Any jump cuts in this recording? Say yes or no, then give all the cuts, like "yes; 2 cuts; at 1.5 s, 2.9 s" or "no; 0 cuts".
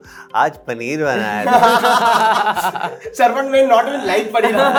no; 0 cuts